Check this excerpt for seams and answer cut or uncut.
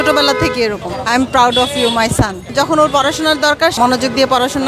cut